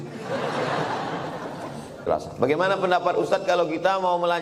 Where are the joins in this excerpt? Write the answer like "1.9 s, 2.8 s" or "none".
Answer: 2.1 s

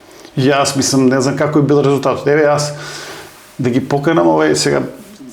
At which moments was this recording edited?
none

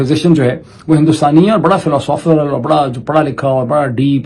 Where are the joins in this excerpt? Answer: none

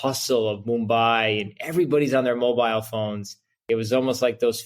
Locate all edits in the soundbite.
3.6 s

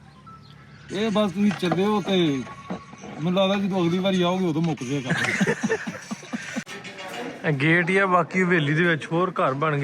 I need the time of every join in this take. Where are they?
6.7 s

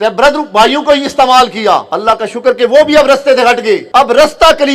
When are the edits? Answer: 1.9 s, 3.8 s

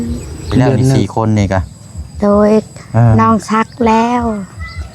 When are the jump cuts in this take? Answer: 1.0 s

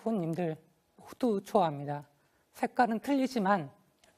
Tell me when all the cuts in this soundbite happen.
2.6 s

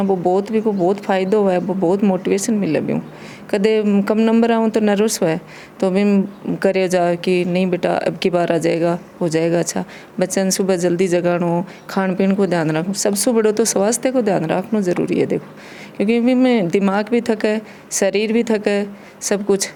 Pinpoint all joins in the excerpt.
none

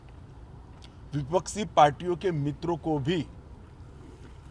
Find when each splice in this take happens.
none

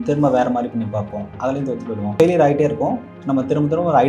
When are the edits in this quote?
2.1 s

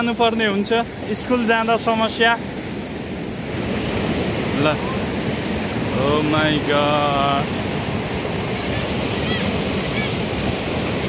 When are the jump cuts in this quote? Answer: none

